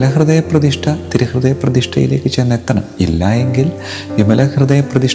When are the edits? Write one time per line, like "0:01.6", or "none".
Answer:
none